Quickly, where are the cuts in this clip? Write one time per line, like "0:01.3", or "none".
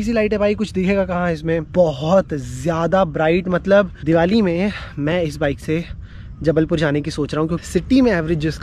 0:01.7
0:04.0
0:07.6